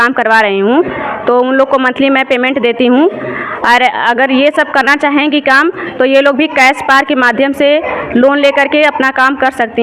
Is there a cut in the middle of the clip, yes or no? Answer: no